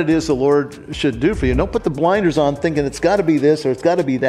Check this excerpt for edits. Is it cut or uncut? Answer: uncut